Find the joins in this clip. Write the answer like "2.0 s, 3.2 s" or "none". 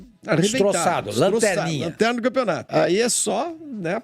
2.6 s